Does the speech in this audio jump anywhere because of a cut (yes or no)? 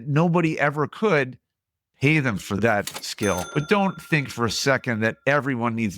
yes